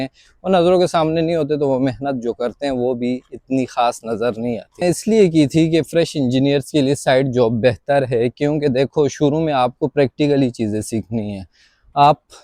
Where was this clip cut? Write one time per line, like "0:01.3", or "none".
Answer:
0:04.6